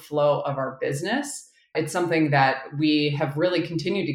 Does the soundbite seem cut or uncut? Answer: cut